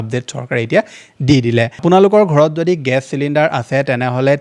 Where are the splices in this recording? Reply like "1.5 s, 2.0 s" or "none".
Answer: 1.8 s